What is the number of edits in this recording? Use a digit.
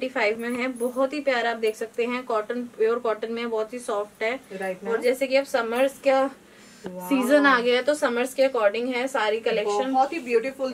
0